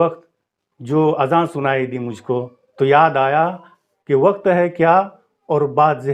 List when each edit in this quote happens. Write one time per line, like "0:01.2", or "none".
none